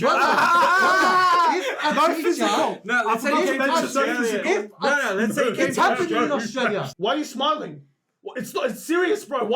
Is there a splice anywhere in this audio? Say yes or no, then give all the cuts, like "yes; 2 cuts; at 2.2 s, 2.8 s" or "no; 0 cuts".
yes; 1 cut; at 6.9 s